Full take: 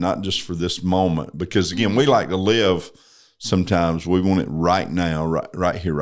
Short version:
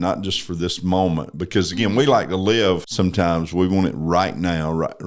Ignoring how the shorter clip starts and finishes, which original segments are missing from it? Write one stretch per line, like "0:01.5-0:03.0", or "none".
0:02.9-0:03.4